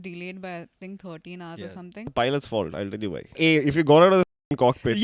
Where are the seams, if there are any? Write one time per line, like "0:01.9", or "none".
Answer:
0:02.1
0:03.4

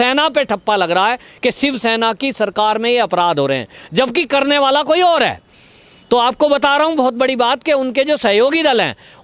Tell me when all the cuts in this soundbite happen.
none

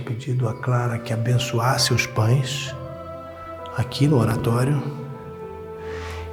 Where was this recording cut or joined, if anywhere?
none

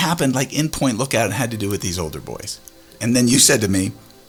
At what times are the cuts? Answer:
none

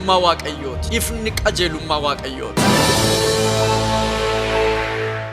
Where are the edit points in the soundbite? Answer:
0:02.6

